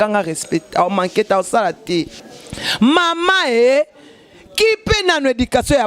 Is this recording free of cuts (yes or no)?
no